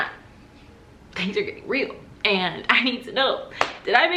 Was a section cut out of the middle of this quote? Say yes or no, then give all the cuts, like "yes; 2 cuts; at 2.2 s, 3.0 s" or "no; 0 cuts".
no; 0 cuts